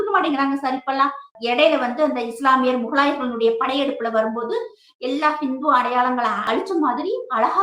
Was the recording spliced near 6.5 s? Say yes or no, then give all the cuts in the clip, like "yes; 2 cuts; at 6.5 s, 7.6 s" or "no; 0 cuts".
yes; 2 cuts; at 1.3 s, 6.5 s